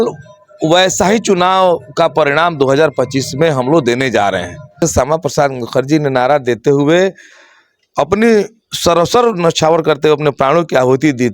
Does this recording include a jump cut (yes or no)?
yes